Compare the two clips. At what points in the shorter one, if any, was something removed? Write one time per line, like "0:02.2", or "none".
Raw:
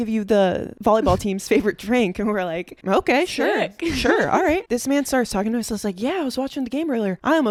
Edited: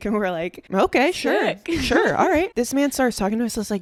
none

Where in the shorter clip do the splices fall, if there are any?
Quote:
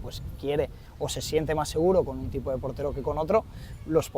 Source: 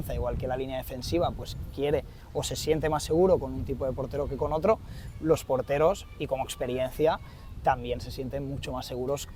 none

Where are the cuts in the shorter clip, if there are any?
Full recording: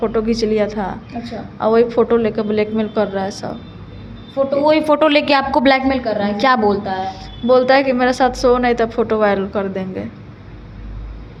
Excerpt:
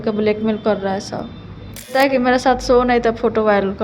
0:01.9

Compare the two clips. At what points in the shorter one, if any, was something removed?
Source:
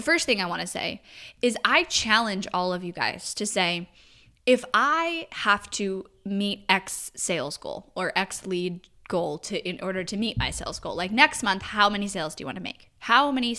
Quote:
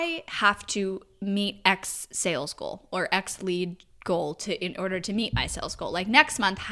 none

